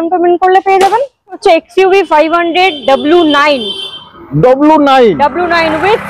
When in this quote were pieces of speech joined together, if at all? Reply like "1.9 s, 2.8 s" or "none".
1.4 s

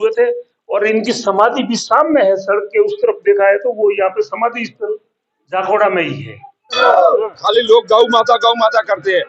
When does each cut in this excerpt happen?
6.8 s

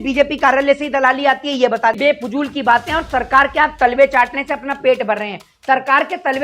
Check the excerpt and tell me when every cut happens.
2.0 s

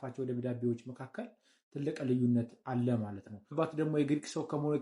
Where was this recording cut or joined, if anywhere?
3.5 s

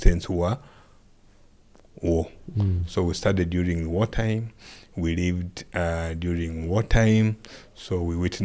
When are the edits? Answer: none

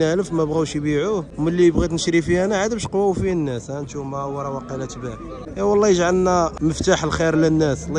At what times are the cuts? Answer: 1.3 s, 5.4 s, 6.5 s

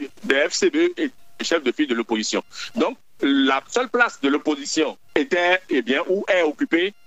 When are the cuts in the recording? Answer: 1.3 s

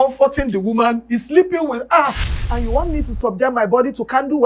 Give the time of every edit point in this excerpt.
2.6 s

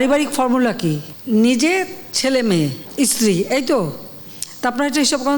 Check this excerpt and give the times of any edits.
1.1 s, 2.8 s

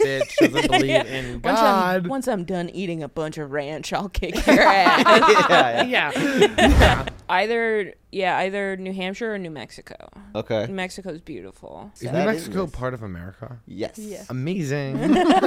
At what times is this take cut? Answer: 7.1 s, 11.9 s

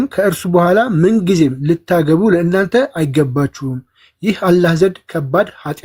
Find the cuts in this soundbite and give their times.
none

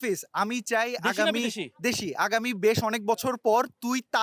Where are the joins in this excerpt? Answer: none

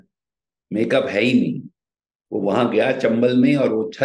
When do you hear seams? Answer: none

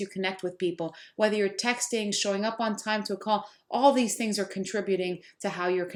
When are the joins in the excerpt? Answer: none

